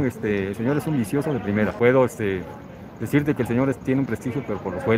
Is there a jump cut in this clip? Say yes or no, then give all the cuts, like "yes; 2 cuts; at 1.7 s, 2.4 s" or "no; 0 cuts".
yes; 1 cut; at 1.7 s